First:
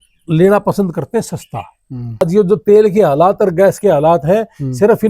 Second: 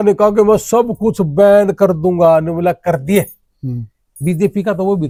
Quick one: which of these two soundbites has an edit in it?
first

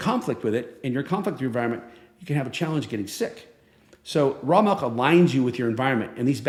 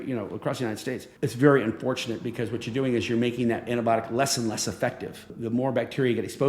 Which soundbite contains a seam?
second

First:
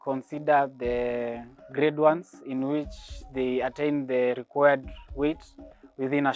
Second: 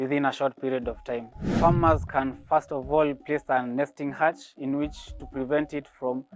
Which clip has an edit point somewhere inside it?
second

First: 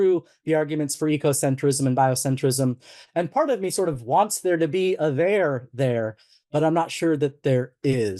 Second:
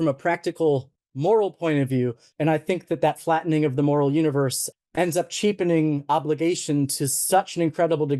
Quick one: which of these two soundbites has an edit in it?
second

